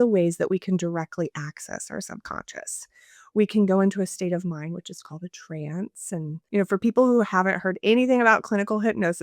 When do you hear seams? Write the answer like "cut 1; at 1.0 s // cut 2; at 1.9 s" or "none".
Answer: cut 1; at 6.4 s